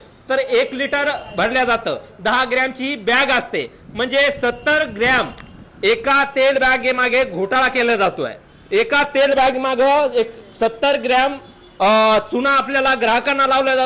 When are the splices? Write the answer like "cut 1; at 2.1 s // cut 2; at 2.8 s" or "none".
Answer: none

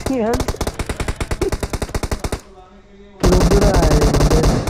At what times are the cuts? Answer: none

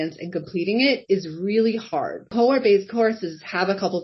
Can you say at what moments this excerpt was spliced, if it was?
cut 1; at 2.3 s

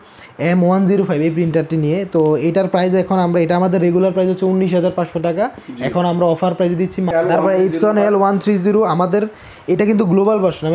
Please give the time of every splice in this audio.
cut 1; at 7.1 s

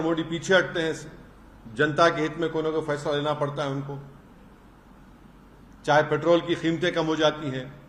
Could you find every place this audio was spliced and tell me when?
none

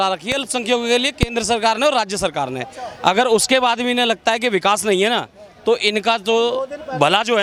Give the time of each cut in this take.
none

